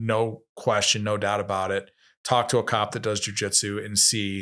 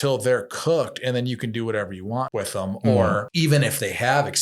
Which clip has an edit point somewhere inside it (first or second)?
second